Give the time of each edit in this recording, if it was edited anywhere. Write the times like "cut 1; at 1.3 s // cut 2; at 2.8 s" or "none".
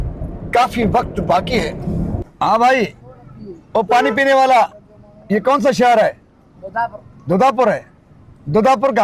cut 1; at 2.2 s